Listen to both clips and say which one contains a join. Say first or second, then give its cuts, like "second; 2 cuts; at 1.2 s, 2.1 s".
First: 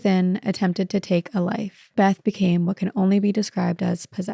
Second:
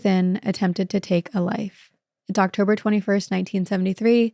first; 1 cut; at 1.9 s